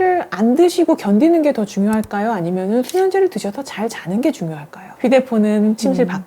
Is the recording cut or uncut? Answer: cut